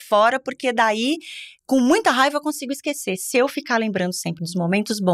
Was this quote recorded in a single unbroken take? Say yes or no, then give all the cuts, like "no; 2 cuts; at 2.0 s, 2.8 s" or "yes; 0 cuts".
yes; 0 cuts